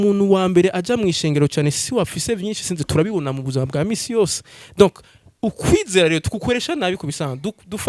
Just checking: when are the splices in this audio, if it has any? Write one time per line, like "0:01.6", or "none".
none